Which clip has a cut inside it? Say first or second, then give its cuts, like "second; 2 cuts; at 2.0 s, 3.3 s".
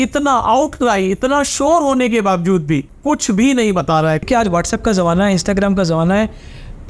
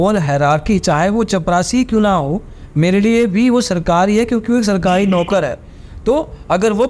first; 2 cuts; at 2.9 s, 4.2 s